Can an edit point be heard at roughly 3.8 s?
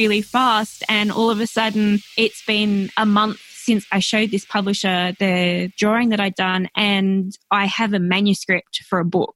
yes; 3 cuts; at 2.1 s, 3.8 s, 5.8 s

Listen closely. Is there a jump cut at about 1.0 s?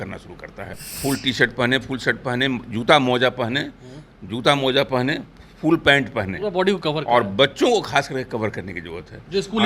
yes; 1 cut; at 1.0 s

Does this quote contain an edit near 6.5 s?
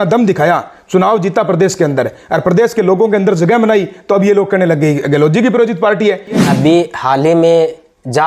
yes; 1 cut; at 6.5 s

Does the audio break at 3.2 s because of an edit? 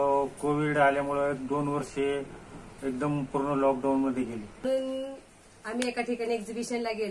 no; 1 cut; at 4.6 s

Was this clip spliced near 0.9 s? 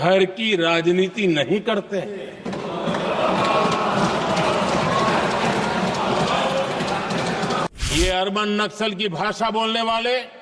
no; 1 cut; at 7.7 s

